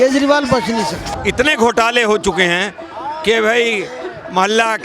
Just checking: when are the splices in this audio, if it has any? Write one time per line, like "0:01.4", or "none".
0:01.1